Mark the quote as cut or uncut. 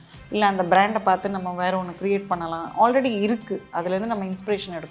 uncut